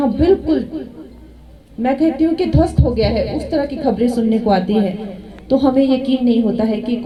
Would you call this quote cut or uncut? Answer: uncut